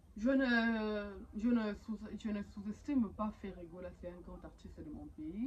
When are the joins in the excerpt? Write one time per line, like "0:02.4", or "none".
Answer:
none